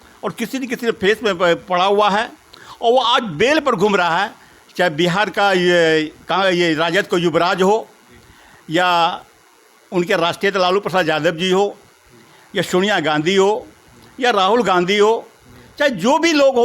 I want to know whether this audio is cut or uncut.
uncut